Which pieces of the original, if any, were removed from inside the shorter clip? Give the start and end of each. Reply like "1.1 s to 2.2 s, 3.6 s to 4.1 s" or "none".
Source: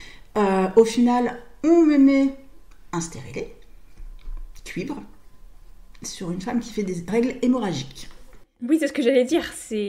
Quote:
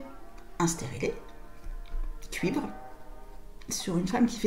none